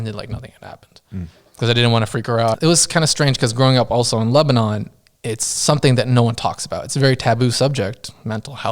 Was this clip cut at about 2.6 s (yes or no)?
yes